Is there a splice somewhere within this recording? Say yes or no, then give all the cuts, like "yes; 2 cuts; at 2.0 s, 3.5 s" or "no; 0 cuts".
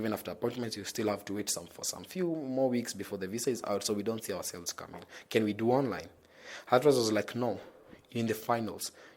no; 0 cuts